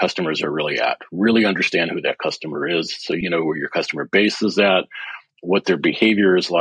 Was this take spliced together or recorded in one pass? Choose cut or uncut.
cut